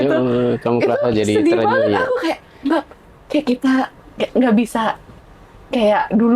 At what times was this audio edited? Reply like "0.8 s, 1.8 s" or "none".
none